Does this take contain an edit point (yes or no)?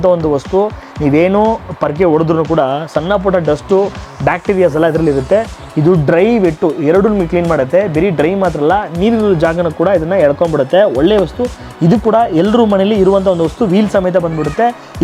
no